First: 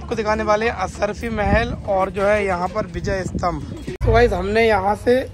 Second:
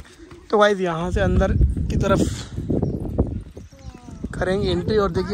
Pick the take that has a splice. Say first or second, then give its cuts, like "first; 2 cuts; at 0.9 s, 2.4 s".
first; 1 cut; at 3.8 s